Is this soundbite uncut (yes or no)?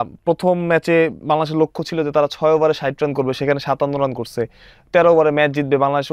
yes